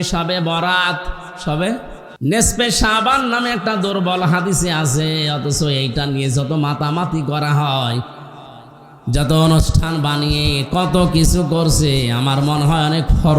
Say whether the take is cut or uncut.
cut